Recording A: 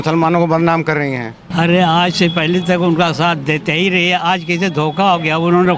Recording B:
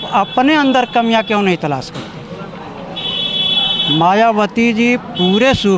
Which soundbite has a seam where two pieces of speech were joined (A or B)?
A